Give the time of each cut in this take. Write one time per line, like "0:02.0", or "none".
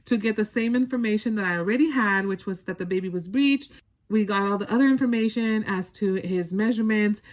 none